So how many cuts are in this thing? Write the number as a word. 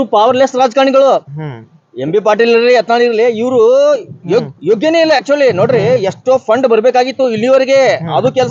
zero